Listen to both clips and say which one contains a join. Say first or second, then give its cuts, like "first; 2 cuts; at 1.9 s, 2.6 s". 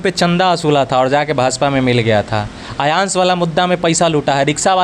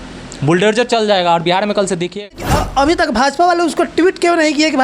second; 1 cut; at 2.2 s